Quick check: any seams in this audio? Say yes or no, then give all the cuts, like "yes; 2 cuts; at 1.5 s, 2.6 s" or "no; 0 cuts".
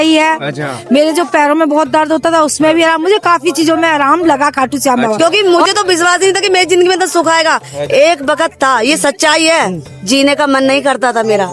yes; 1 cut; at 5.1 s